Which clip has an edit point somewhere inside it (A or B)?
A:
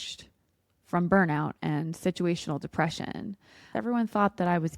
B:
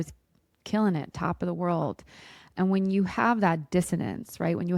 A